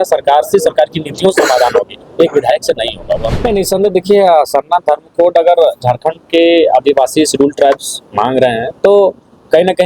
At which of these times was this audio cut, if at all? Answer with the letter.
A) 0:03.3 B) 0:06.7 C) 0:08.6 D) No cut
A